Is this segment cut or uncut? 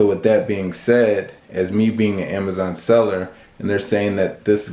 uncut